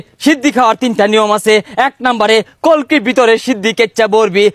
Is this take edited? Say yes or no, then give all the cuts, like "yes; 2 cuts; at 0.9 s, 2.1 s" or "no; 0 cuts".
no; 0 cuts